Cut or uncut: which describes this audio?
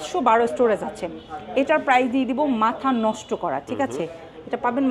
uncut